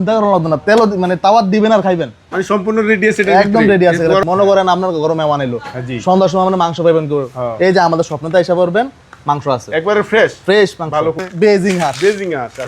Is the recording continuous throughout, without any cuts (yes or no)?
no